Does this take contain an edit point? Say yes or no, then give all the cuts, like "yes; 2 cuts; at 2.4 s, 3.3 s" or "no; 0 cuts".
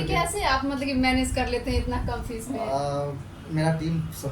no; 0 cuts